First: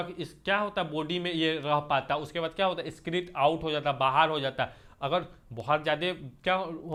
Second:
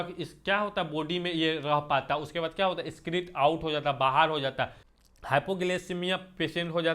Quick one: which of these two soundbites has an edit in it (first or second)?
second